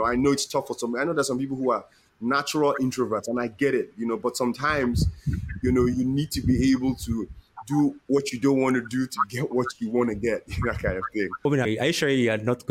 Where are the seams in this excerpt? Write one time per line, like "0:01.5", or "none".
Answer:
0:11.7